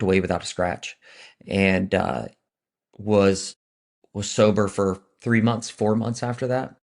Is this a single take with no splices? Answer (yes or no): yes